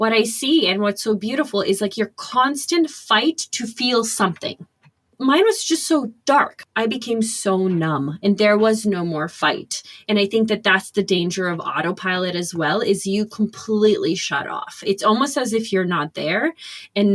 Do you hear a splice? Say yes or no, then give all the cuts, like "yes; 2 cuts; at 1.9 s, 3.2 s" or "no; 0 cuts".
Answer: yes; 2 cuts; at 5.4 s, 6.6 s